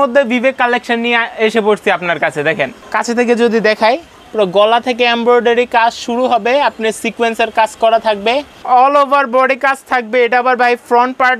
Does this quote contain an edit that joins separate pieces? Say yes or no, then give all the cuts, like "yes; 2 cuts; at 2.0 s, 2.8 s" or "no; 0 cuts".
yes; 2 cuts; at 2.8 s, 8.6 s